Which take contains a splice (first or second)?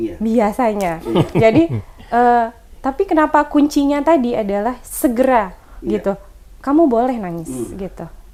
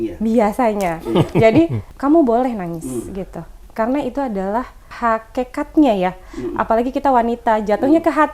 second